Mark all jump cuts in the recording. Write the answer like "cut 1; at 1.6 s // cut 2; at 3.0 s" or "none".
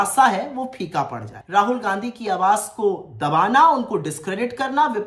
cut 1; at 1.3 s